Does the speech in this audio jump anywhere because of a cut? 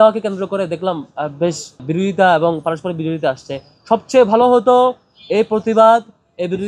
yes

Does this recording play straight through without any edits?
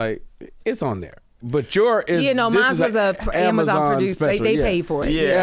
yes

